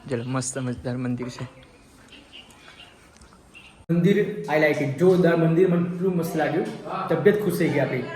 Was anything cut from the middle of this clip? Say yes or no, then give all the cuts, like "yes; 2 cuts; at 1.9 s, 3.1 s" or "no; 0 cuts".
yes; 1 cut; at 3.9 s